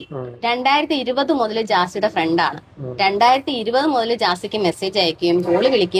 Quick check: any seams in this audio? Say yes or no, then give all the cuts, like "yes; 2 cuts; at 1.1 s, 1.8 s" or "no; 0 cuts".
yes; 1 cut; at 3.1 s